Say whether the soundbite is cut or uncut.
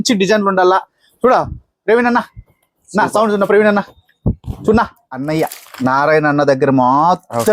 cut